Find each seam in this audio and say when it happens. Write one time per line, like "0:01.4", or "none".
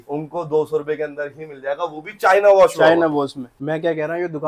0:03.5